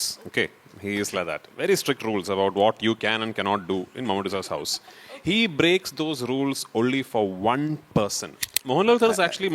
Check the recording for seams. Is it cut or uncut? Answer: cut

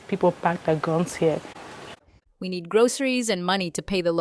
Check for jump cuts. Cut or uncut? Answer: cut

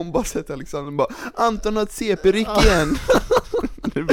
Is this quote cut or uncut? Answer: uncut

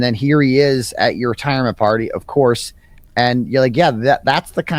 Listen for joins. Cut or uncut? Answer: uncut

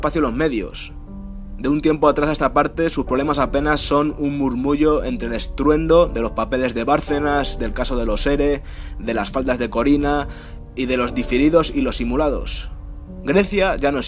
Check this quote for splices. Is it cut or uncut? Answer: cut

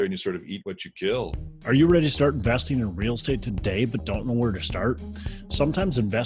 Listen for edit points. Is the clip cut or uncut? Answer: cut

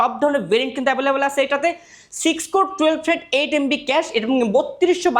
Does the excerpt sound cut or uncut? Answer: uncut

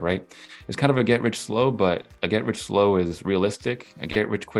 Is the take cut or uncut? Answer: uncut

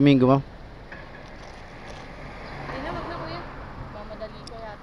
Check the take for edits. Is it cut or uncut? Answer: uncut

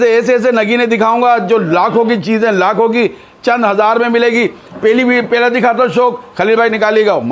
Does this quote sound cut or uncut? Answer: uncut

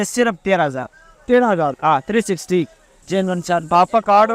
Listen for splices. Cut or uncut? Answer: cut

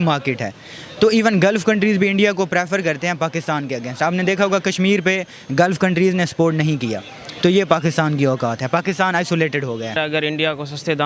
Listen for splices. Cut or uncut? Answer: cut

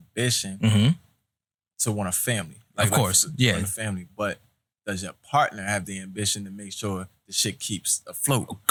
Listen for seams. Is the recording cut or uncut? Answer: uncut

